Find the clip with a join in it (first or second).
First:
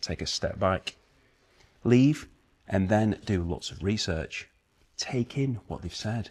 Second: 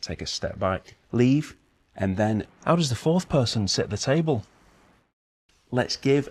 second